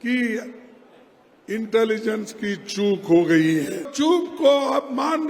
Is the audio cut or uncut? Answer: cut